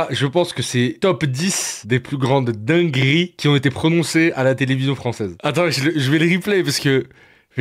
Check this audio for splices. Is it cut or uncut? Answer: uncut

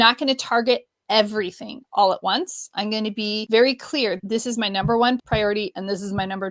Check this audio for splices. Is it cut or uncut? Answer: cut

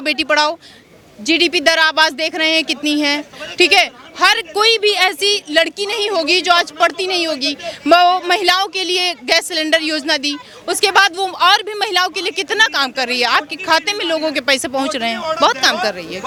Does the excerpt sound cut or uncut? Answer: uncut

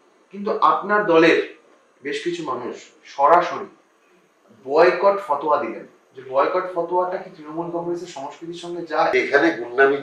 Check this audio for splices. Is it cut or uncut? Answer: cut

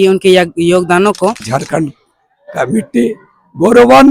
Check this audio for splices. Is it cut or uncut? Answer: cut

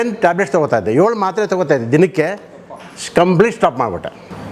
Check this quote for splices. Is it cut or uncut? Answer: uncut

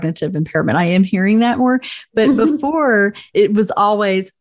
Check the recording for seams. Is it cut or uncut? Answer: cut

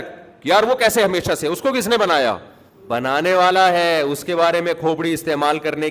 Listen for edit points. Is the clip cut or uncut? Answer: cut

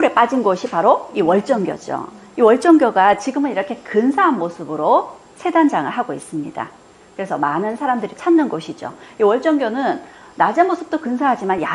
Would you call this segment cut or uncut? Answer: uncut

